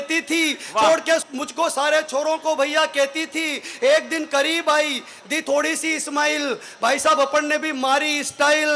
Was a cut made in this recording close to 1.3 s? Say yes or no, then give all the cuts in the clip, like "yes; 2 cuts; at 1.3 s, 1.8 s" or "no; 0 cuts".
yes; 1 cut; at 1.3 s